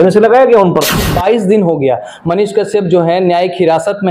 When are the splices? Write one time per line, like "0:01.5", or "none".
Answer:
0:01.1